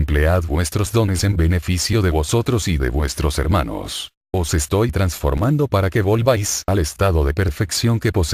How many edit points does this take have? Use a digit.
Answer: 1